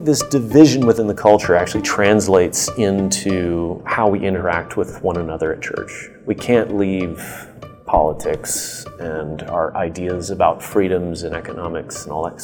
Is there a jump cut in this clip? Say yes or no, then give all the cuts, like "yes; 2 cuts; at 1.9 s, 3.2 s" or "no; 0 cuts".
no; 0 cuts